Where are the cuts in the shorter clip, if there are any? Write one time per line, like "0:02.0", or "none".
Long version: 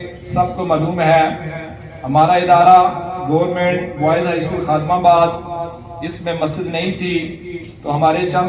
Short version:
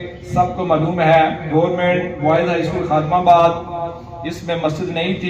0:01.4